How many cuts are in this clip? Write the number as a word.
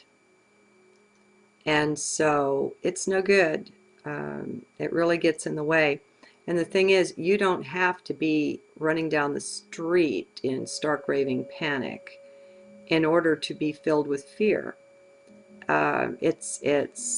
one